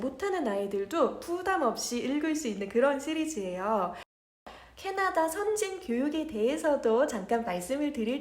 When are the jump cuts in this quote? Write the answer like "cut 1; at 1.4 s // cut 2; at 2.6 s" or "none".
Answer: cut 1; at 4.4 s